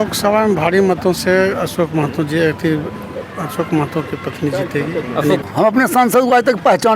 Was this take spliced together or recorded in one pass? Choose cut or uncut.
cut